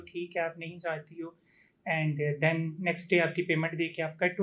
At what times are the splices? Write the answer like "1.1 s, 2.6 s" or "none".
none